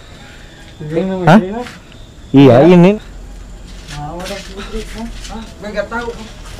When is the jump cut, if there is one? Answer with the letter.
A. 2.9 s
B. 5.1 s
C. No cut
A